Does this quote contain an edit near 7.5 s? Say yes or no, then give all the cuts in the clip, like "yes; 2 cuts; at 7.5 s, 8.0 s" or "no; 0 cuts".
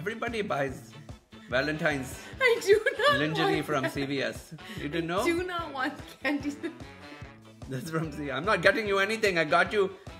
no; 0 cuts